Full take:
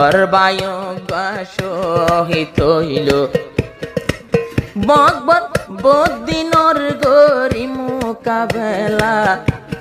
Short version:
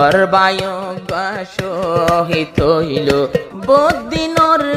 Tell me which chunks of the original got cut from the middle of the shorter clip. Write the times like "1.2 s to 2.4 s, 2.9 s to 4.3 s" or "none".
3.5 s to 5.7 s